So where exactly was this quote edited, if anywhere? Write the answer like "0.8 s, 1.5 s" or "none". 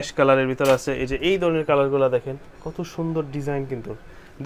none